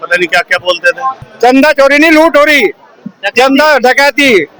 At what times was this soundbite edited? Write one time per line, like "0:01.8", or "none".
0:01.3